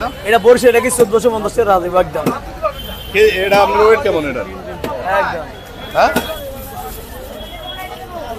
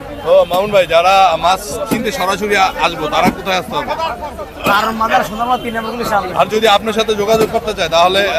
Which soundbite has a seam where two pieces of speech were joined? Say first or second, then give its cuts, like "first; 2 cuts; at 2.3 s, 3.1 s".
first; 1 cut; at 6.3 s